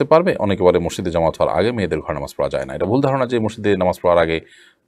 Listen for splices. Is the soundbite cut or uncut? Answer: uncut